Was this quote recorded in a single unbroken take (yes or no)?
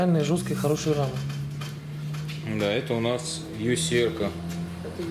yes